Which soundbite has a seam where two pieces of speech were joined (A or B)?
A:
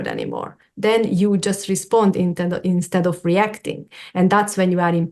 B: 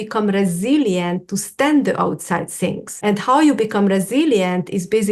B